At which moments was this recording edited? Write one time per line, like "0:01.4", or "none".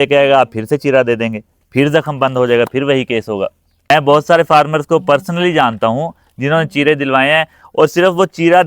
0:03.9